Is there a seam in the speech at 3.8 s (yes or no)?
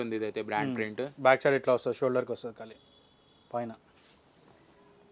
no